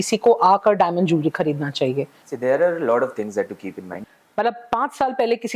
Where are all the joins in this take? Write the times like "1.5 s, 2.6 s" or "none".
2.2 s, 4.0 s